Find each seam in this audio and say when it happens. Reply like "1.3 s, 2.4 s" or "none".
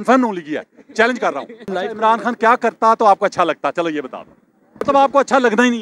1.7 s, 4.8 s